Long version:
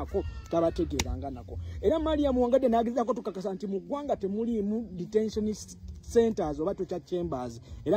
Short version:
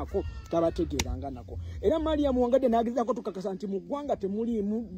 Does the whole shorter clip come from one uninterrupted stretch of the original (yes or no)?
yes